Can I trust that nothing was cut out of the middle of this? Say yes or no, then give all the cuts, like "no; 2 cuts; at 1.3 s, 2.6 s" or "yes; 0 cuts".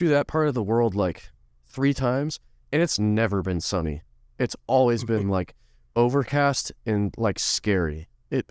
yes; 0 cuts